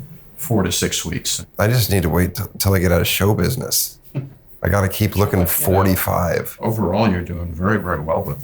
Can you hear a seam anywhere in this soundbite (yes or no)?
yes